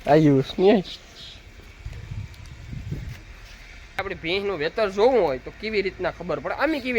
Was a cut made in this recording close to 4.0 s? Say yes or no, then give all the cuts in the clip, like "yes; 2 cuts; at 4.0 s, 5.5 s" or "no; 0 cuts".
yes; 1 cut; at 4.0 s